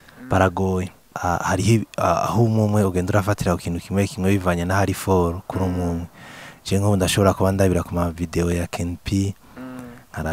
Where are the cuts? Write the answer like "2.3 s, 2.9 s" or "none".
1.1 s